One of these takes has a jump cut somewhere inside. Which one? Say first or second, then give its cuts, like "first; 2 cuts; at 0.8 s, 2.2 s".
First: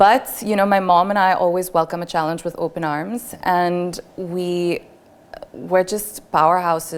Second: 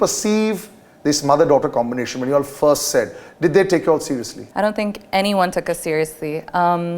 second; 1 cut; at 4.4 s